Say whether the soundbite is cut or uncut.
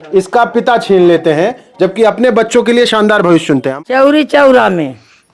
cut